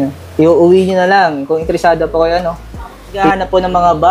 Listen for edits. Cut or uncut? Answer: cut